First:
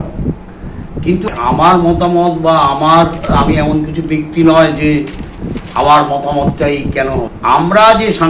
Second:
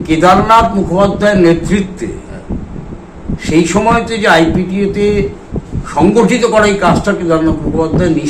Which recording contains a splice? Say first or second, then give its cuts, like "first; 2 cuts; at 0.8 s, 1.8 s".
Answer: first; 2 cuts; at 1.3 s, 7.3 s